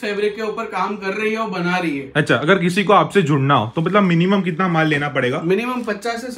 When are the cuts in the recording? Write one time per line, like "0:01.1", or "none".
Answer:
none